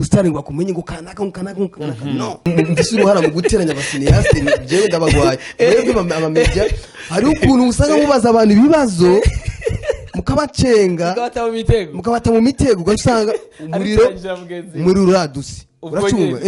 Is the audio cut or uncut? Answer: cut